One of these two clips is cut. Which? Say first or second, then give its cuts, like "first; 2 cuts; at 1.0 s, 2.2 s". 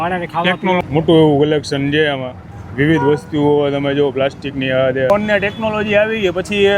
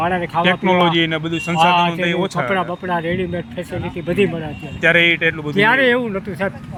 first; 2 cuts; at 0.8 s, 5.1 s